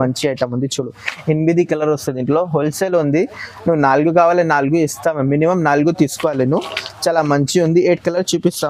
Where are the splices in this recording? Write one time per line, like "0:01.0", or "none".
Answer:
none